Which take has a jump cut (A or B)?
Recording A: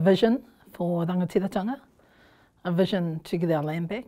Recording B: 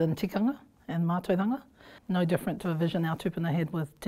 B